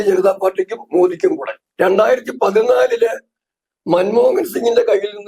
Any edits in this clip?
yes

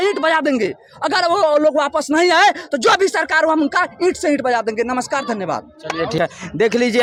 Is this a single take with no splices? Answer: yes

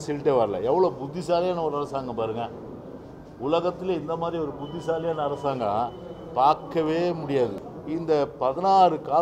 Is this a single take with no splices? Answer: no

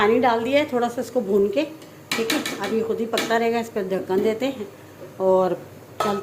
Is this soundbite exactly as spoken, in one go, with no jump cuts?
yes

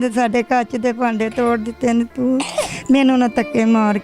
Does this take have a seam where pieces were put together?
no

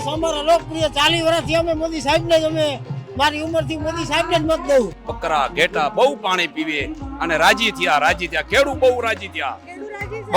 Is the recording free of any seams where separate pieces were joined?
no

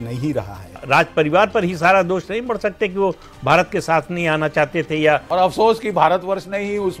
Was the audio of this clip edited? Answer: yes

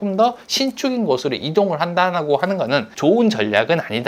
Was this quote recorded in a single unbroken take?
no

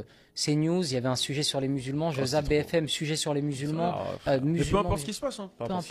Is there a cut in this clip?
no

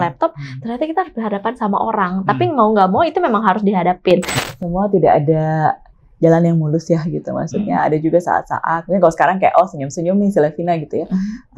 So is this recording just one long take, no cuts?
no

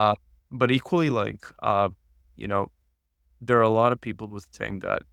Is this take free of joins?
yes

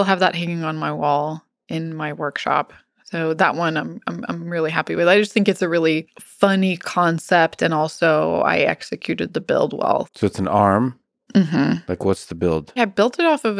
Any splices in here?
yes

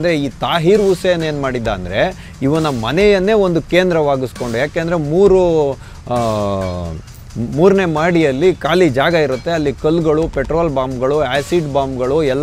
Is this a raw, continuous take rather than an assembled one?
yes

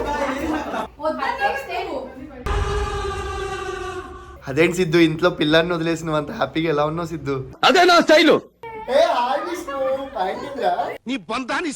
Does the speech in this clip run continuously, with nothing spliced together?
no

